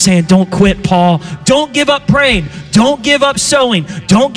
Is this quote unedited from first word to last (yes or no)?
no